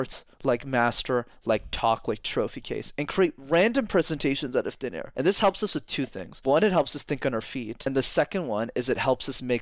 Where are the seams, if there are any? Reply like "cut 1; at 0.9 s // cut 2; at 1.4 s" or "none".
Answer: cut 1; at 5.0 s // cut 2; at 6.2 s // cut 3; at 7.7 s